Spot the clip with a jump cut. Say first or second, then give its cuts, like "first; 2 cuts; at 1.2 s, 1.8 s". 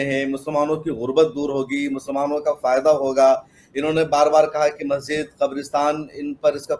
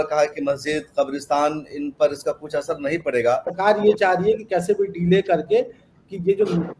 second; 1 cut; at 3.5 s